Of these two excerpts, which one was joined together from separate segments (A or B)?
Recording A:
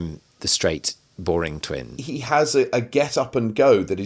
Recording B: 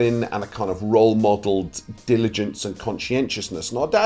A